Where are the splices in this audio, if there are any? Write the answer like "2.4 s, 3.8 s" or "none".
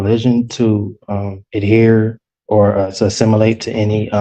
none

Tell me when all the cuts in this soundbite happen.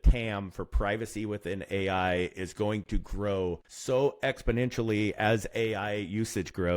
3.7 s

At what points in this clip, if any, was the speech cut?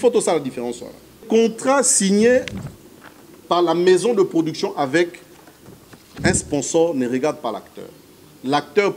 1.2 s

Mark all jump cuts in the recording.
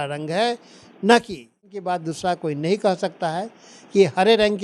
1.7 s

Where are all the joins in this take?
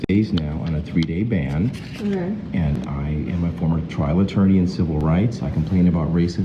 none

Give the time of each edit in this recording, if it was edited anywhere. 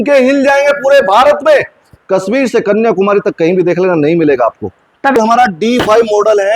5.2 s

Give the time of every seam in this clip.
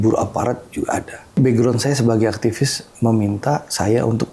1.4 s

